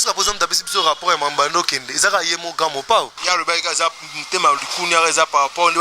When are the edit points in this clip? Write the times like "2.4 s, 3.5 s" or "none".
3.2 s